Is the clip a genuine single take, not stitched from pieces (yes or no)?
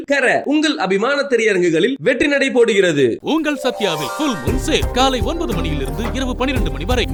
yes